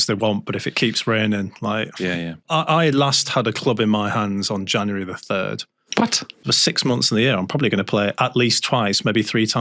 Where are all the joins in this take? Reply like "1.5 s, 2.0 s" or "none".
2.4 s, 6.5 s